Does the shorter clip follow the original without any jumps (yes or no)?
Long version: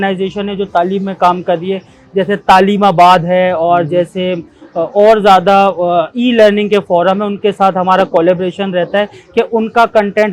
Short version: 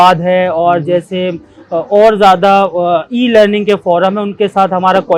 yes